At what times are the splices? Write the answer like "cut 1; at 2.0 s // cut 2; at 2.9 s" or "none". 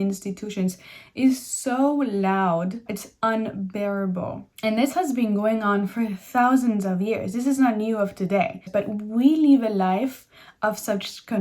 cut 1; at 2.8 s // cut 2; at 4.4 s // cut 3; at 8.7 s